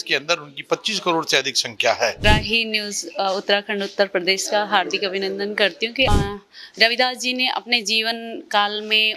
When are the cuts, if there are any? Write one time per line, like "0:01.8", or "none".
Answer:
0:02.2
0:06.1